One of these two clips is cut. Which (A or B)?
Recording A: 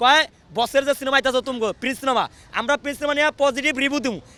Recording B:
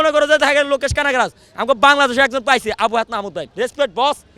B